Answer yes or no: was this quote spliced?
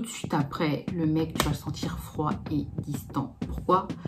no